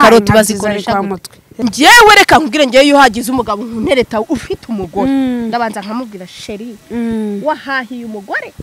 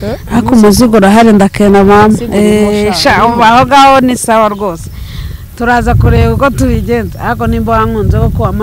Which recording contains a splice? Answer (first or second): first